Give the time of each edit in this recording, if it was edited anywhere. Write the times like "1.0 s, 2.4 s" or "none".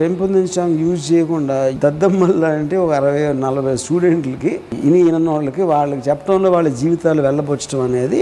1.8 s, 4.7 s